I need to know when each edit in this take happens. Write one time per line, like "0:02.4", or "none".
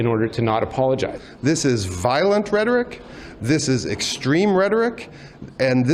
0:01.2